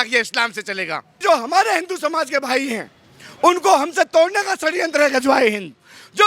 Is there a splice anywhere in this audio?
yes; 1 cut; at 1.2 s

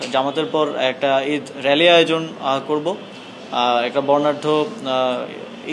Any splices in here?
no; 0 cuts

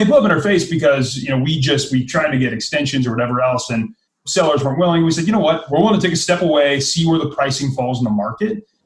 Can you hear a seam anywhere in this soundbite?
yes; 2 cuts; at 4.2 s, 5.6 s

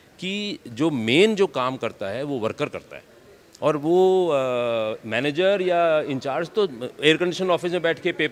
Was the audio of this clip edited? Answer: no; 0 cuts

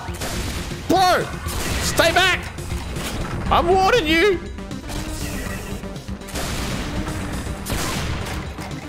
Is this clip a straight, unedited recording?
yes; 0 cuts

